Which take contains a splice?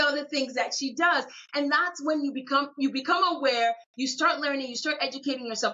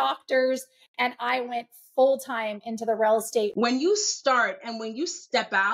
second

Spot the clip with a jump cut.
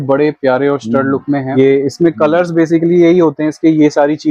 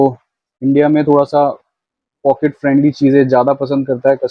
first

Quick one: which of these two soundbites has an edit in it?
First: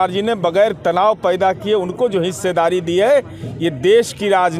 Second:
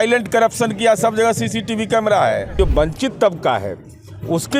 second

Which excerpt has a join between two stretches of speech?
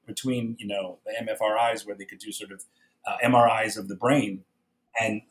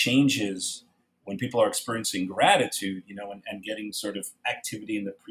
first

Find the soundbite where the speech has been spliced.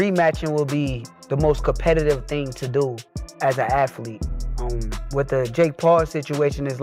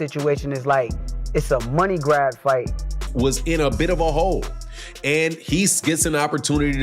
second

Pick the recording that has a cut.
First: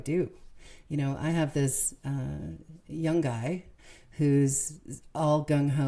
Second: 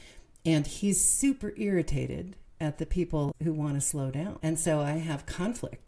second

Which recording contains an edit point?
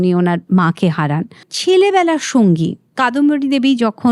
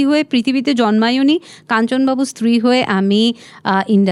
first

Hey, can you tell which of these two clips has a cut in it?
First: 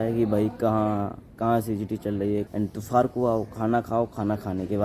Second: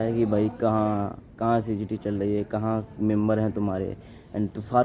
first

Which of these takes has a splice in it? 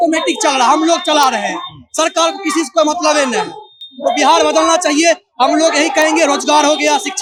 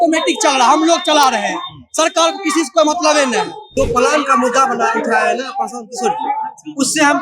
second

